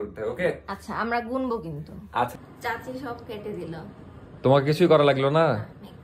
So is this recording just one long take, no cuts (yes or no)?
no